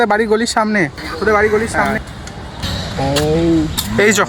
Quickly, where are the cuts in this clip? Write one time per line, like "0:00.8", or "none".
0:01.9